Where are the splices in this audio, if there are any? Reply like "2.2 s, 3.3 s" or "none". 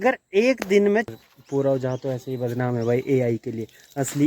1.1 s